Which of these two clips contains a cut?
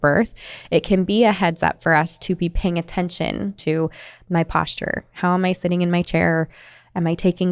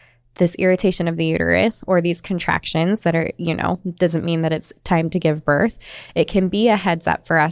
first; 1 cut; at 3.6 s

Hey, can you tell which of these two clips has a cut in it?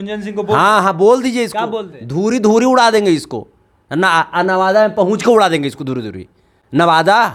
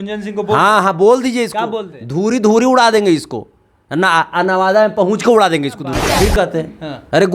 second; 1 cut; at 6.0 s

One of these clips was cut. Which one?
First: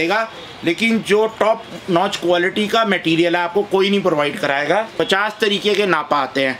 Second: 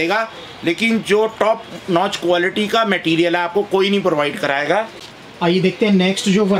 first; 1 cut; at 4.9 s

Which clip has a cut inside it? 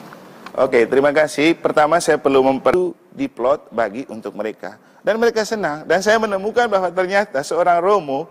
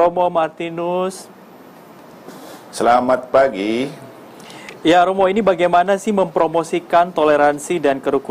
first; 1 cut; at 2.7 s

